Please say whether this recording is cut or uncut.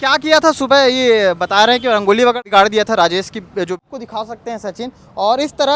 cut